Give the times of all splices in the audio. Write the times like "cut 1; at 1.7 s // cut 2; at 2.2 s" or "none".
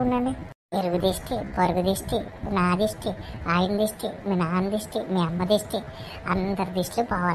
none

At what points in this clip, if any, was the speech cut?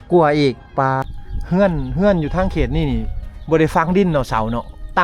cut 1; at 1.1 s

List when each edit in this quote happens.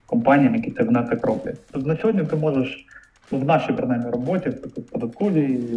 cut 1; at 1.6 s

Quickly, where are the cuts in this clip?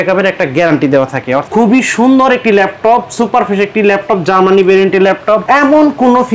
cut 1; at 1.4 s // cut 2; at 5.4 s

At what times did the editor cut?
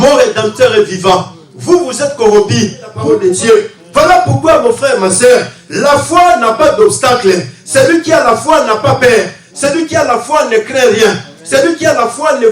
cut 1; at 3.0 s

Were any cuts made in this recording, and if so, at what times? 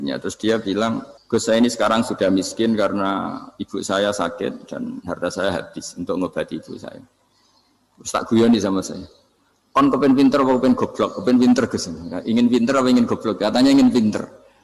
cut 1; at 1.1 s

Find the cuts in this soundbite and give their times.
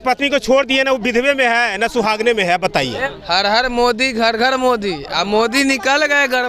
cut 1; at 3.0 s

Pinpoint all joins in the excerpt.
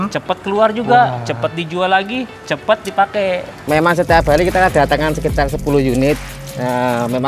cut 1; at 3.5 s

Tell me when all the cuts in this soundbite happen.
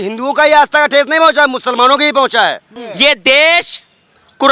cut 1; at 2.8 s

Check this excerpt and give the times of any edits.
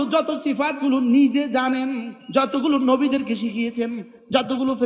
cut 1; at 2.1 s

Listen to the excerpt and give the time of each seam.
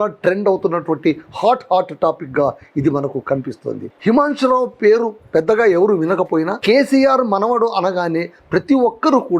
cut 1; at 3.9 s

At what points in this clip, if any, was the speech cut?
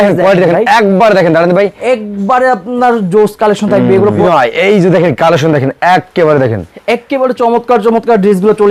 cut 1; at 4.2 s

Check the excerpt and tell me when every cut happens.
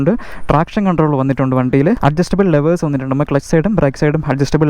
cut 1; at 2.0 s

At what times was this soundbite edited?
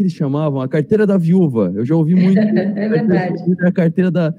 none

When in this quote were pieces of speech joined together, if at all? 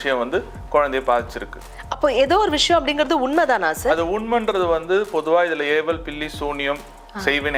none

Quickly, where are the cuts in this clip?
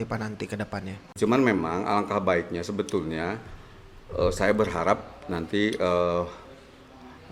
cut 1; at 1.0 s

